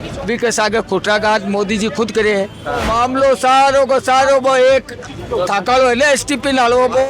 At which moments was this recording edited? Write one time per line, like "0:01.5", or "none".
0:02.9